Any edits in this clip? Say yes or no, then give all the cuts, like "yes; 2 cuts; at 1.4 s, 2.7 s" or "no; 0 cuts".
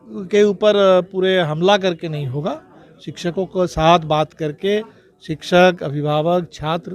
no; 0 cuts